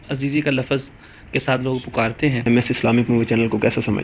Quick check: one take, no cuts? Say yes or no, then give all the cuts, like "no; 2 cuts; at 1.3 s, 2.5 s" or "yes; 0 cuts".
no; 1 cut; at 2.5 s